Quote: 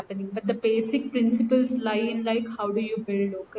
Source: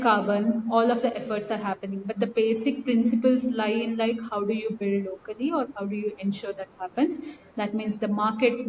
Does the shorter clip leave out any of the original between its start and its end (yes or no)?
no